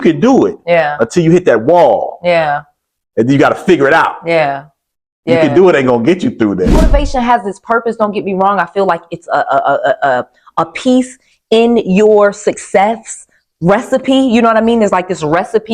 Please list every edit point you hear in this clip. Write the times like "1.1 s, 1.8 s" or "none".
6.8 s